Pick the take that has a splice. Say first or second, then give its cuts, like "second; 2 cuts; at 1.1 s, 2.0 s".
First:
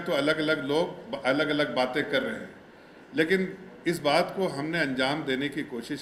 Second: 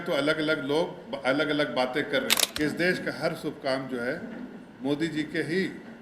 second; 1 cut; at 2.4 s